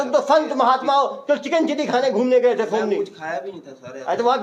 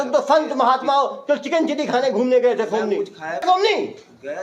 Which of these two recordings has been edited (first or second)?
second